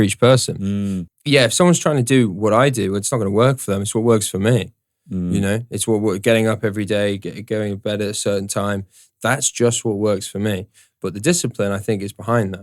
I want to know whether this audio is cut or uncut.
cut